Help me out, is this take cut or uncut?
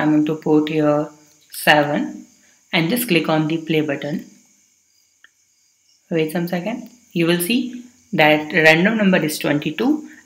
uncut